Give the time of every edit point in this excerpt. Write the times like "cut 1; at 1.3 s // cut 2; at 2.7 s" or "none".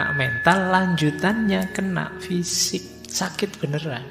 cut 1; at 3.0 s